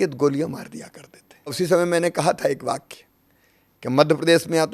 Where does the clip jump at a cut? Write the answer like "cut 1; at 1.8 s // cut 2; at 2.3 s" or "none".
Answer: cut 1; at 1.5 s